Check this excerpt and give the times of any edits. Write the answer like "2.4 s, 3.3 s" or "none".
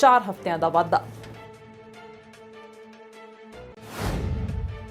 1.1 s, 3.4 s